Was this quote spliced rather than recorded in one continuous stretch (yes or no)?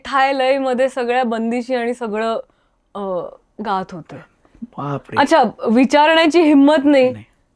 no